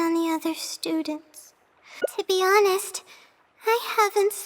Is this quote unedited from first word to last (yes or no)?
no